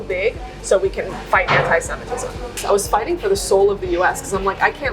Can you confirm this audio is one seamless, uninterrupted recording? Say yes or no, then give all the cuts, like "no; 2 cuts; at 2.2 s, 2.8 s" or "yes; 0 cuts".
no; 1 cut; at 2.5 s